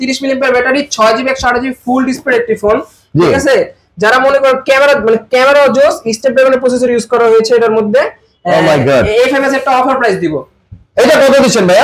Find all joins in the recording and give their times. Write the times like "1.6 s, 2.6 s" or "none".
none

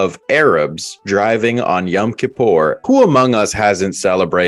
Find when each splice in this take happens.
2.8 s

